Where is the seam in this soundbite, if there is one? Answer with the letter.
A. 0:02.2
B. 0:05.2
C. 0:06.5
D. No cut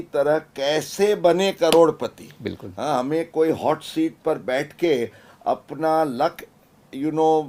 D